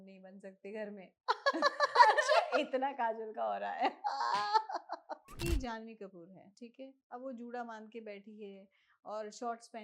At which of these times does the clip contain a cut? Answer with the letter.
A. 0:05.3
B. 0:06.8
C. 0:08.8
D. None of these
A